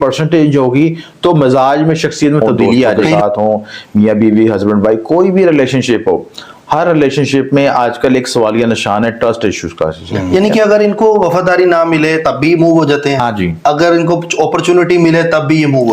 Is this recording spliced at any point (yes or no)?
yes